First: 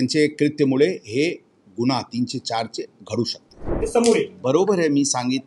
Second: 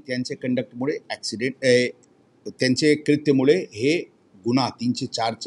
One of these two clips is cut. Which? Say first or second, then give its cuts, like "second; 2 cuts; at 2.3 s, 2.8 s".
first; 1 cut; at 3.8 s